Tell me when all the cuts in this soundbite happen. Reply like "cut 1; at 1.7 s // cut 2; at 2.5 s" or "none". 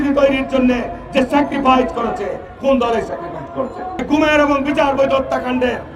cut 1; at 4.0 s